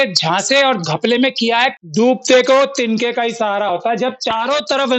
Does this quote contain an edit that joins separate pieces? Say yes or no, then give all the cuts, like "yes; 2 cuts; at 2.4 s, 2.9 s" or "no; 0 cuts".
yes; 1 cut; at 1.8 s